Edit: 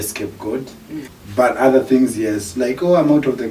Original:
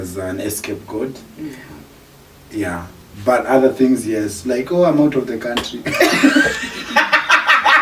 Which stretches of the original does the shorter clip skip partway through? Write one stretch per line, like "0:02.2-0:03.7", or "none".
0:01.7-0:03.1